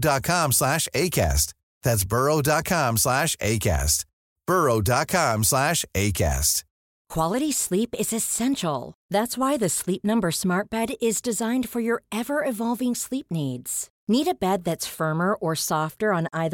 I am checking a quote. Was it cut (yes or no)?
yes